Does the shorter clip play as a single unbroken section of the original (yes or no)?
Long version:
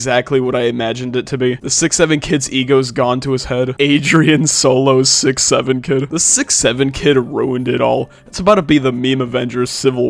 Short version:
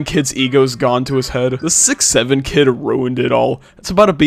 no